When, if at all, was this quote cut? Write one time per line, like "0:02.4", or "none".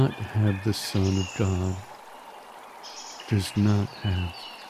0:01.8
0:03.3